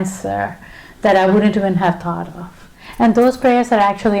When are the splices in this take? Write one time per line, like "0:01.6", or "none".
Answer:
0:02.8